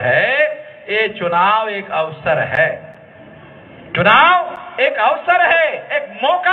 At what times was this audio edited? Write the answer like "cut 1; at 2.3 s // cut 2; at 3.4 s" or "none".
none